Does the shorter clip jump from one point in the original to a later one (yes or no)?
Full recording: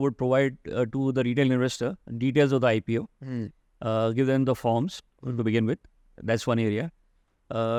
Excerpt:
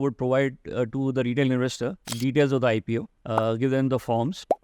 yes